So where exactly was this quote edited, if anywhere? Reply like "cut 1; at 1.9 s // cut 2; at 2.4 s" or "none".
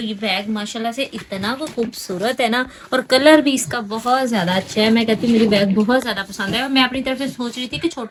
none